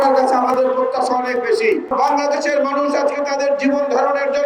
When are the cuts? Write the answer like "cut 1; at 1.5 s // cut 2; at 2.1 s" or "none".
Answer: cut 1; at 1.9 s